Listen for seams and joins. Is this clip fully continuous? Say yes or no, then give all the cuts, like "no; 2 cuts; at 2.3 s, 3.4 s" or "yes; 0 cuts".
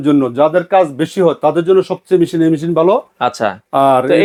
yes; 0 cuts